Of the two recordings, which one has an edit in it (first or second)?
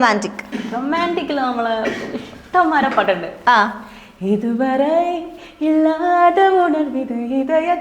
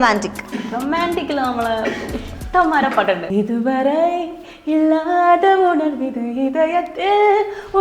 second